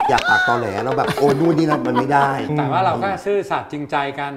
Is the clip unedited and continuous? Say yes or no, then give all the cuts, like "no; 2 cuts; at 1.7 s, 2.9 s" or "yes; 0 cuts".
no; 1 cut; at 2.5 s